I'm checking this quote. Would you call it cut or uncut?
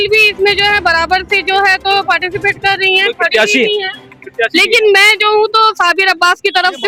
uncut